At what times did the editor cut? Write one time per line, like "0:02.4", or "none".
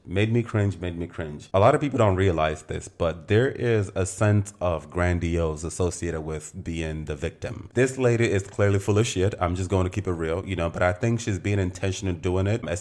0:01.4
0:07.6

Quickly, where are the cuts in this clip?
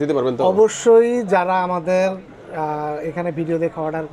none

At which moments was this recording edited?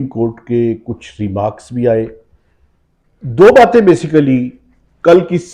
0:03.2

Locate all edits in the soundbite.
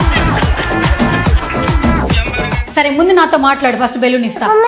0:02.6

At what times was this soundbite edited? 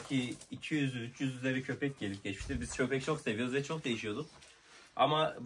none

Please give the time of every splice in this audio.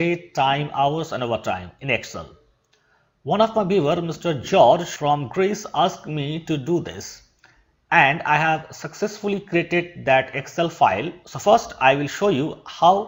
none

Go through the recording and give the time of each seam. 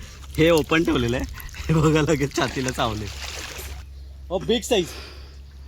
0:03.7

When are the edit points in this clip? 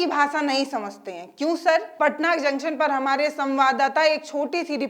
0:01.9

